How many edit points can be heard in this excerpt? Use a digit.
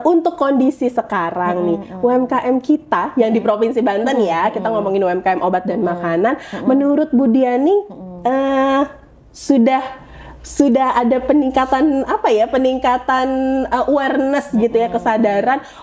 0